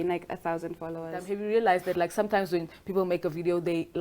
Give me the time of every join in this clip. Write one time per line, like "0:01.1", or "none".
0:01.2